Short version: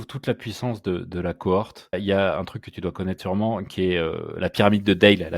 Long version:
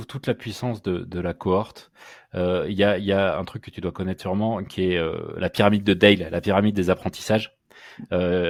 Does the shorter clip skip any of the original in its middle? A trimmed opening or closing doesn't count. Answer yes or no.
yes